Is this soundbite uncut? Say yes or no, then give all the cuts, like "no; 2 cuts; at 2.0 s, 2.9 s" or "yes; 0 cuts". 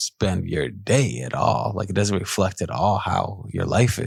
yes; 0 cuts